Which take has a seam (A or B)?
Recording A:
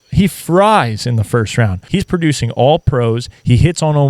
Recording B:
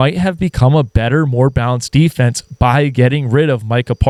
A